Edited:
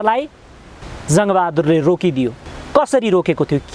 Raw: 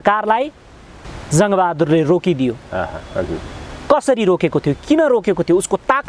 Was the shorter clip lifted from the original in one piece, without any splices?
no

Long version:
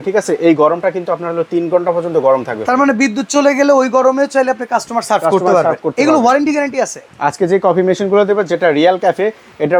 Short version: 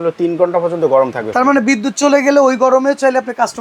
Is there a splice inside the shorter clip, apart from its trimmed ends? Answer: no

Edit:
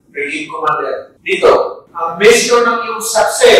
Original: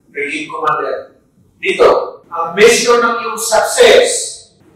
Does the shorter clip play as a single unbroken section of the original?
no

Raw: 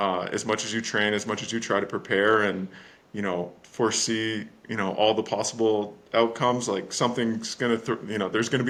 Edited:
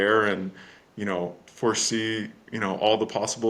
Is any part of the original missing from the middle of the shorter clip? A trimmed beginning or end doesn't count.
no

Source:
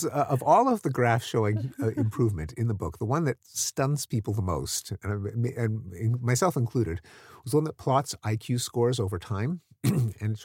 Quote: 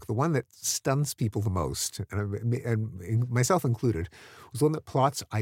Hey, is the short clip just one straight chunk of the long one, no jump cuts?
yes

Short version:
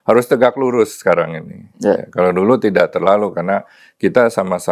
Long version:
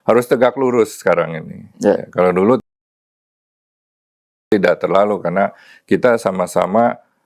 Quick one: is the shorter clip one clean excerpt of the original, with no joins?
no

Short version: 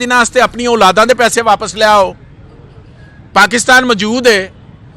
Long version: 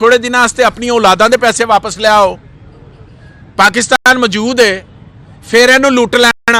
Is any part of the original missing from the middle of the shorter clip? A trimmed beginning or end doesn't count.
yes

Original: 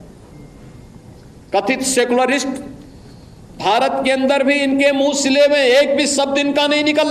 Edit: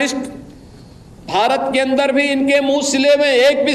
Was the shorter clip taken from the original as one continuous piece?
yes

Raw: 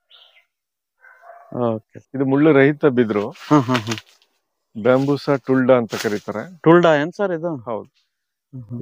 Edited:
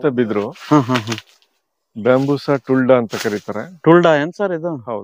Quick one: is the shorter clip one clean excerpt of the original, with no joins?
yes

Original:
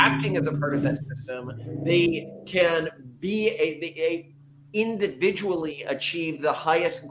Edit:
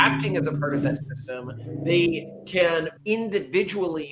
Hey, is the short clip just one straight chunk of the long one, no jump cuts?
no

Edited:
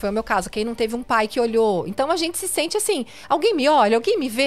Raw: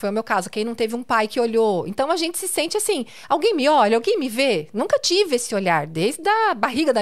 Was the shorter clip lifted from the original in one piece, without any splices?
yes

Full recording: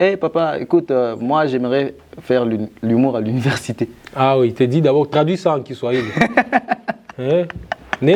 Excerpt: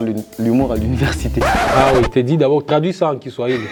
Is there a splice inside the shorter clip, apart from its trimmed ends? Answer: no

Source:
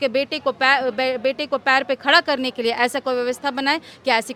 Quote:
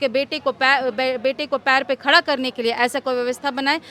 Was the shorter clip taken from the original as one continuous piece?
yes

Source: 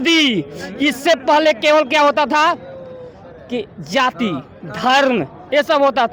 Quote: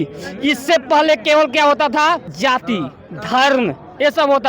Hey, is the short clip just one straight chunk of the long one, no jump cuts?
no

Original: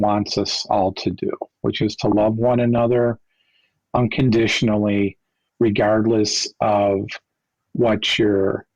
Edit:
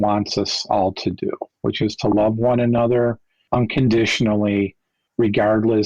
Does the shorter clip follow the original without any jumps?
no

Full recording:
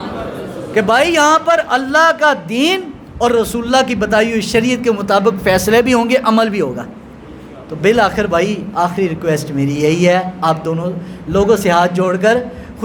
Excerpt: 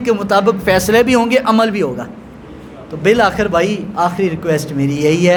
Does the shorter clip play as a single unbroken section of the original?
yes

